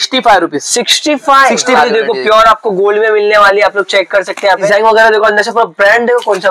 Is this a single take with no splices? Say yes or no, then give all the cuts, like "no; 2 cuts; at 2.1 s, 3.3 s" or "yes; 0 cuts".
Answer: no; 2 cuts; at 1.7 s, 4.7 s